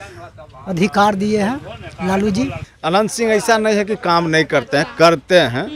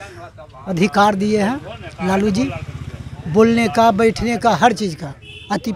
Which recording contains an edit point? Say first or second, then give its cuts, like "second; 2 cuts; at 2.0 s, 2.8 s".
first; 1 cut; at 2.7 s